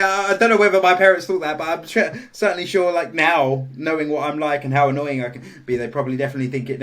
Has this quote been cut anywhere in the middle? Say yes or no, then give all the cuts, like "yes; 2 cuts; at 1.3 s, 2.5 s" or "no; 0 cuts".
no; 0 cuts